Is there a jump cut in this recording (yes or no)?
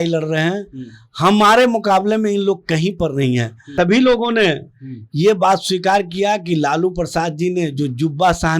yes